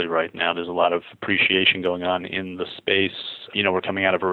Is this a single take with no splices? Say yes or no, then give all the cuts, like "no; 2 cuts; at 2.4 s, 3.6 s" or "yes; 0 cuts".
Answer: yes; 0 cuts